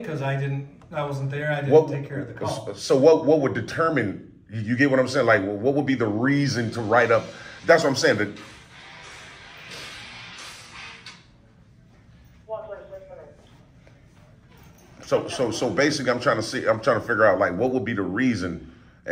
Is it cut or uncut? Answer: uncut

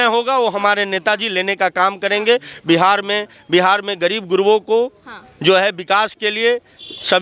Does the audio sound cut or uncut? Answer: uncut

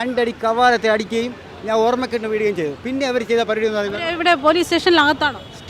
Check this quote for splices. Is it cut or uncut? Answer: uncut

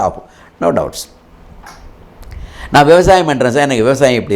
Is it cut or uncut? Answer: uncut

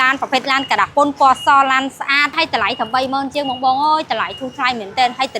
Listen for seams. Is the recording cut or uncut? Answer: cut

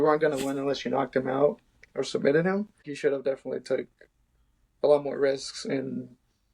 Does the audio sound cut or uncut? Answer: cut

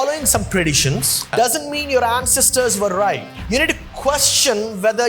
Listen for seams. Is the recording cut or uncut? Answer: cut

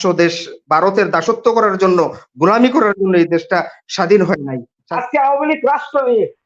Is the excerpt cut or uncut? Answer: cut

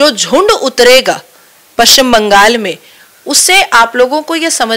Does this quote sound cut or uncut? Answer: uncut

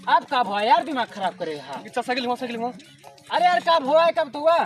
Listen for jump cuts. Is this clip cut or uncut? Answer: uncut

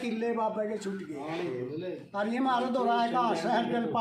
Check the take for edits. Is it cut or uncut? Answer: uncut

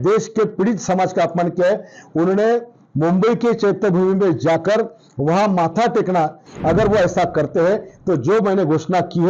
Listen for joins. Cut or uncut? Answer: cut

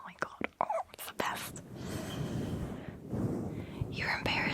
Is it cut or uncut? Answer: uncut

